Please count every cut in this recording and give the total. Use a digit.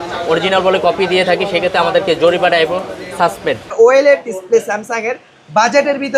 1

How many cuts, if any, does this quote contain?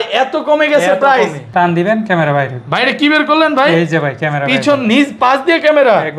1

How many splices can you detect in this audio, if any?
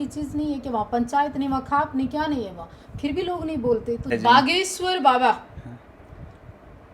1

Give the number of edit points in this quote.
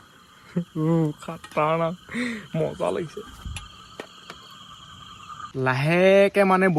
1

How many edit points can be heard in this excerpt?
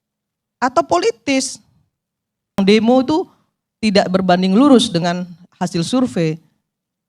1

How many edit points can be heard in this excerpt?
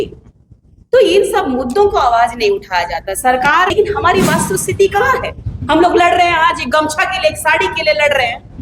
1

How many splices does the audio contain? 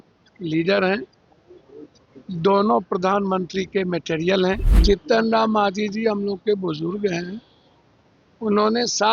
1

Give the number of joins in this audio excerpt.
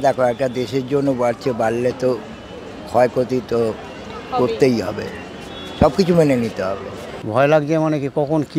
1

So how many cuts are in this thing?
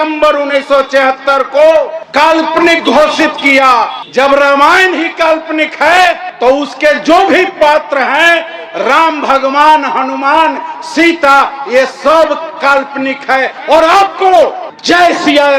0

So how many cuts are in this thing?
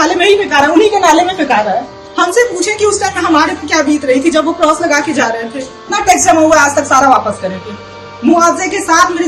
2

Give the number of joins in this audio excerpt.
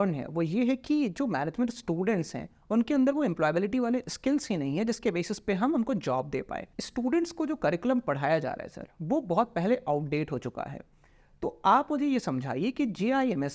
1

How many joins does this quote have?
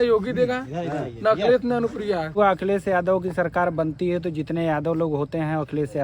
1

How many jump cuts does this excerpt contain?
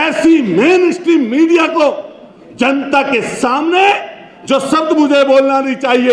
0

